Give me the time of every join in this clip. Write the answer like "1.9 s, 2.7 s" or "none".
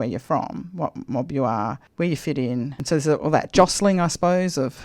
2.7 s